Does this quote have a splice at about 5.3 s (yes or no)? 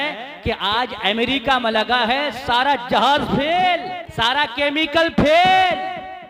no